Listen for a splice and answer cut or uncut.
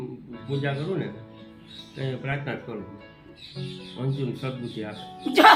uncut